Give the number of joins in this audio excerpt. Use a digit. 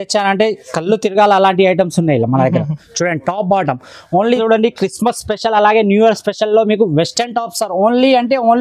1